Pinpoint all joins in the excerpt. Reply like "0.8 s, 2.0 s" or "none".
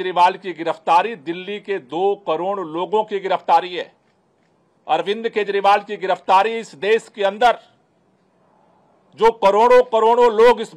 none